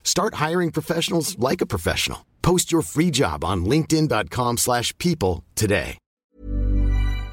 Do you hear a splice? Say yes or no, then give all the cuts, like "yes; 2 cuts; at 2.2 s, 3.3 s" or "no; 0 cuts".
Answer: yes; 1 cut; at 6.4 s